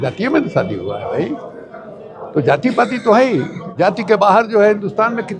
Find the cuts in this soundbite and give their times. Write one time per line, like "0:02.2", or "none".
0:03.6